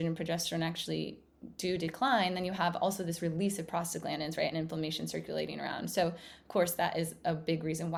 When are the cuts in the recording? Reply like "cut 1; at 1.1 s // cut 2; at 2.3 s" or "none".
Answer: none